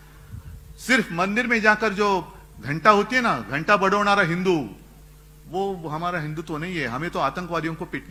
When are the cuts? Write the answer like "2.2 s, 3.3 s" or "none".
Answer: none